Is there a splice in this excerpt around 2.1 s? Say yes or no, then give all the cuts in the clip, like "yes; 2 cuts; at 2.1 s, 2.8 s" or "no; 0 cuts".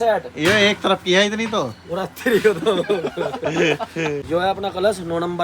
no; 1 cut; at 4.2 s